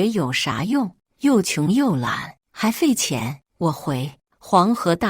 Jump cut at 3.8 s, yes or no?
yes